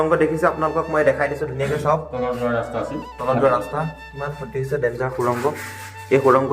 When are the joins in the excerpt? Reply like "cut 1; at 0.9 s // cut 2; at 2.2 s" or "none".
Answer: none